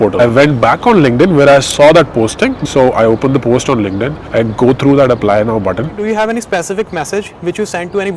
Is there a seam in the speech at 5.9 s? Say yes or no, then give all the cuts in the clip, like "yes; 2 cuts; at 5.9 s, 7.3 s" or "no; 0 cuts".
yes; 1 cut; at 5.9 s